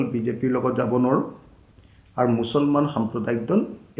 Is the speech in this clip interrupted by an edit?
no; 0 cuts

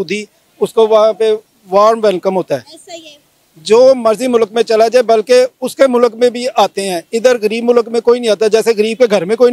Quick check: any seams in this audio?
no; 0 cuts

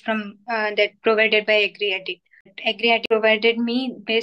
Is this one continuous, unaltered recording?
no; 1 cut; at 2.6 s

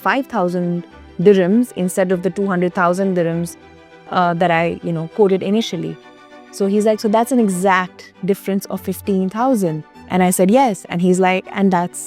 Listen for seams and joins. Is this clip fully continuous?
yes; 0 cuts

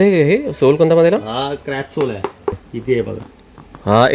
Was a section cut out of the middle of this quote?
yes; 1 cut; at 2.7 s

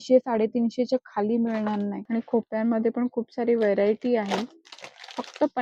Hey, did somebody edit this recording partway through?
yes; 1 cut; at 2.0 s

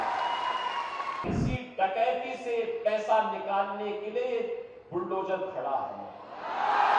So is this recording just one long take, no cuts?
no; 1 cut; at 1.2 s

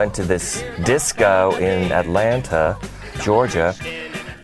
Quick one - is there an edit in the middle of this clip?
no; 0 cuts

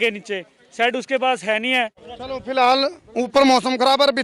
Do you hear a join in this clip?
yes; 1 cut; at 2.1 s

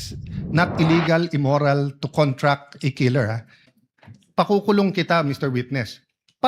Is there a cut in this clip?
yes; 1 cut; at 3.7 s

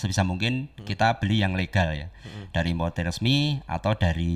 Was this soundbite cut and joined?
no; 0 cuts

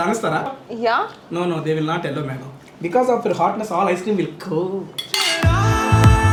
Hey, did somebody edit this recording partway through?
no; 0 cuts

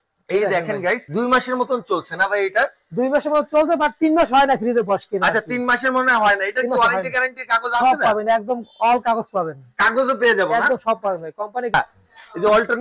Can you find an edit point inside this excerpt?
yes; 2 cuts; at 1.0 s, 11.7 s

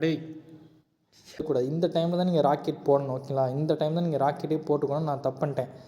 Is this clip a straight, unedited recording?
no; 1 cut; at 1.4 s

